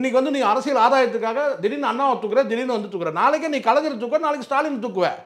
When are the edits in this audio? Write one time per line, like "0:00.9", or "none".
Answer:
none